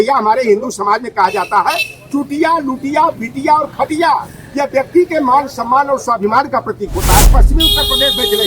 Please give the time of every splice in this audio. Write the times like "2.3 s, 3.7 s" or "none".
7.3 s